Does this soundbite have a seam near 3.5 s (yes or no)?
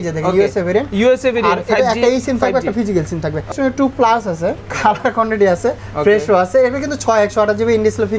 yes